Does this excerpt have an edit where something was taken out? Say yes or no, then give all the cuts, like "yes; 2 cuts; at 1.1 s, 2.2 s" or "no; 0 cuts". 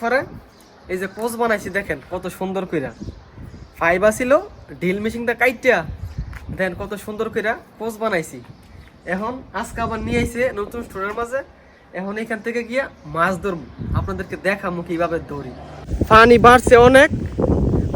yes; 1 cut; at 15.8 s